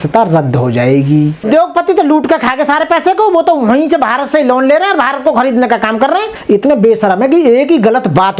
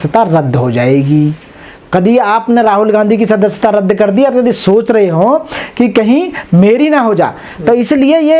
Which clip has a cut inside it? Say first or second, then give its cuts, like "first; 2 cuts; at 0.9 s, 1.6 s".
first; 2 cuts; at 1.5 s, 6.3 s